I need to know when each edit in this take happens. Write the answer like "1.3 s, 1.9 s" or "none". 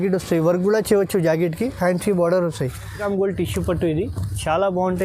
3.0 s